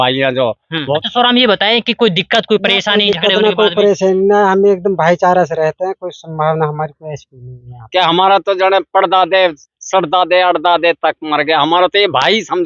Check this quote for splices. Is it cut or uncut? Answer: cut